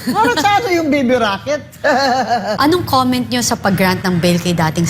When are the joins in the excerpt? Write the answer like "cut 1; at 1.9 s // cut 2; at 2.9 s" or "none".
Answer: cut 1; at 2.6 s